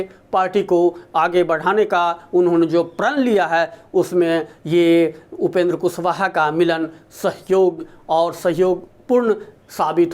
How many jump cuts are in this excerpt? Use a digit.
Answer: 1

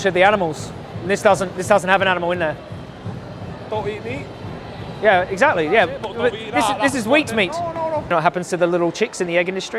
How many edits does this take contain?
1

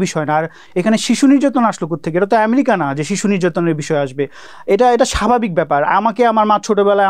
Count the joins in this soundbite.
0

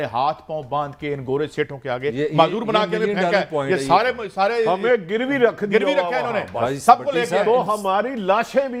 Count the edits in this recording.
0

